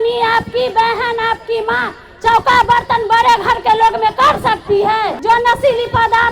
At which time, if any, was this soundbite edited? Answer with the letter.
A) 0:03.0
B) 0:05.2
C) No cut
B